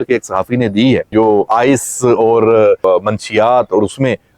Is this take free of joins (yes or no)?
no